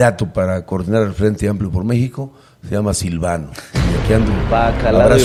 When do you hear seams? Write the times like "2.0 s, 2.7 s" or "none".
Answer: none